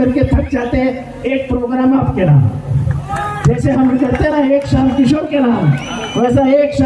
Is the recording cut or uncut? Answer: uncut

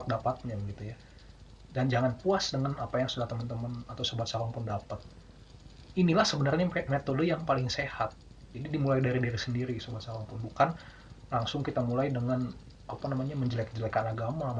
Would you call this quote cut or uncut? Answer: uncut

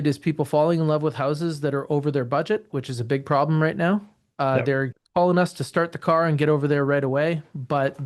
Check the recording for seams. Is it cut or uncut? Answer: uncut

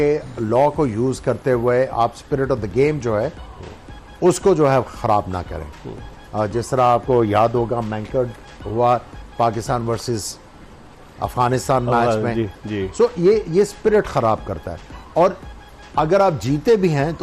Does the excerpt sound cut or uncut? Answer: uncut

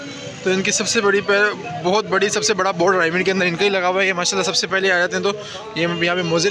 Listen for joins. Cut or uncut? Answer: uncut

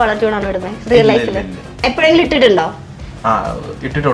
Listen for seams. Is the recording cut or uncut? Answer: uncut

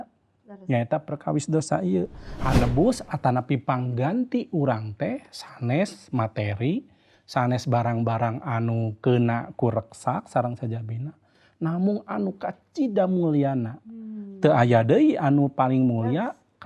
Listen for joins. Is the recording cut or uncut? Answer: cut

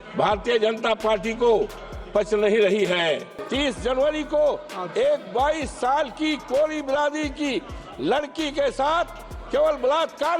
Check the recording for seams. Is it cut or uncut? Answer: cut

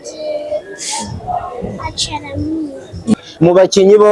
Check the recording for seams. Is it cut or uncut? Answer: cut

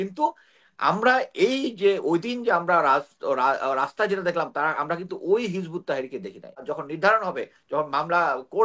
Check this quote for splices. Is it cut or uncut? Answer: cut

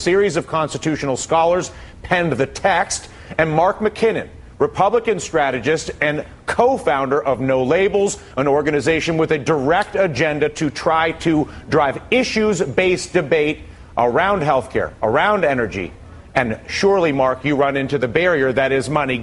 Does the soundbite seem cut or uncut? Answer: uncut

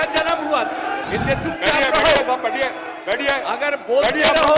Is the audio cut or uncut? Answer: cut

